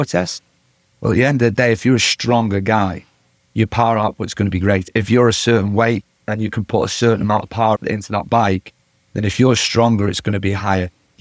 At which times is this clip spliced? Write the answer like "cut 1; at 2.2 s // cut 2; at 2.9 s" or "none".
cut 1; at 4.9 s // cut 2; at 7.8 s